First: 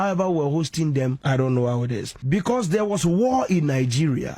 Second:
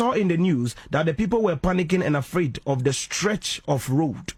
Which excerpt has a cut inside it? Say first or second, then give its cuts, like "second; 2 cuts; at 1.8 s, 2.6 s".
first; 2 cuts; at 1.2 s, 2.1 s